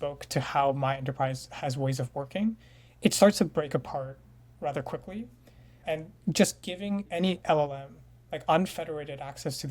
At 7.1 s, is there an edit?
yes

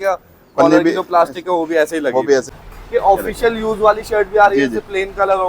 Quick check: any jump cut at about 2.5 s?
yes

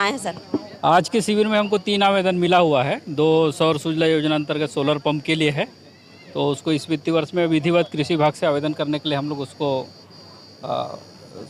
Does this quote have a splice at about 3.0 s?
no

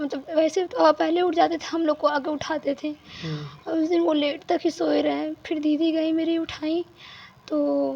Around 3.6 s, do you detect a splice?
no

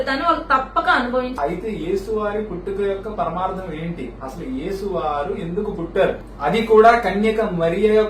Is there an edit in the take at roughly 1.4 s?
yes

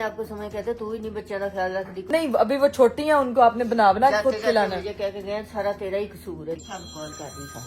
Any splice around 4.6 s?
no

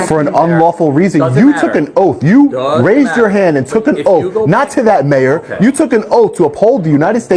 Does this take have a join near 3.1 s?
no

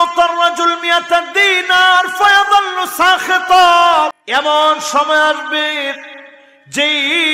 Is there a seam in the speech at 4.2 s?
yes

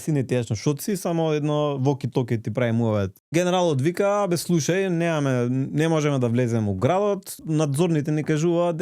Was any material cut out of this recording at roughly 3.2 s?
yes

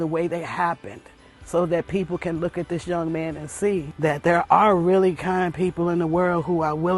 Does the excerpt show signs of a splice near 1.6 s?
no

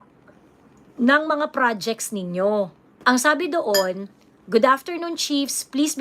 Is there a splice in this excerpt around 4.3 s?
no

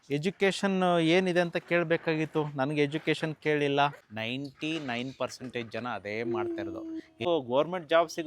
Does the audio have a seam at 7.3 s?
yes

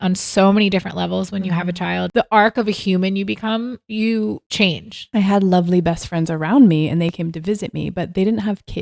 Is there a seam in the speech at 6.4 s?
no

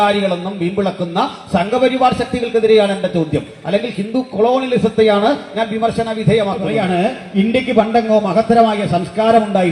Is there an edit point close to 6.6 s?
yes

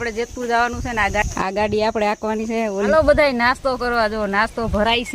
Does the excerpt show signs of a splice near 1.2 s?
yes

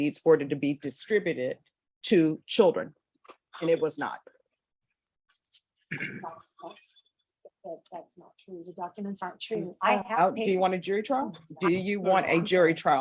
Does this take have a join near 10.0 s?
yes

